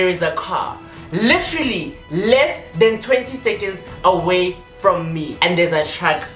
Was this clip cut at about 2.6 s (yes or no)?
no